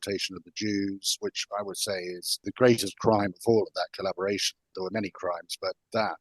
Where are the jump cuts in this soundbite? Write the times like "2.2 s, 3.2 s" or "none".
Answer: 2.4 s, 4.7 s